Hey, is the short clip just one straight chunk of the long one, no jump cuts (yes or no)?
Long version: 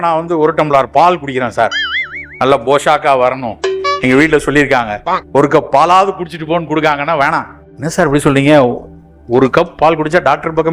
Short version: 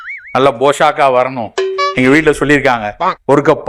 yes